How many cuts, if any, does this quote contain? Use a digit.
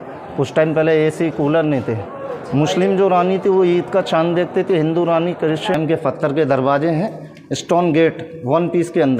1